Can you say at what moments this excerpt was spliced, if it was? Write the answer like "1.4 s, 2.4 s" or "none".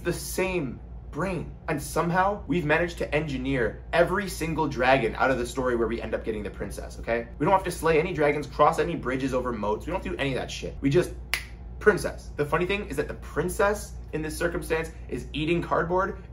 none